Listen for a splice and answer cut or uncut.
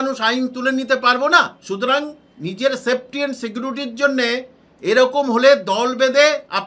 cut